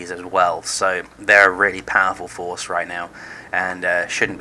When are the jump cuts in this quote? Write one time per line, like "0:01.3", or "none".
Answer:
0:02.4